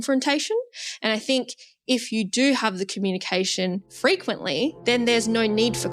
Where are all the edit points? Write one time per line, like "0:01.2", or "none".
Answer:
0:03.9
0:04.8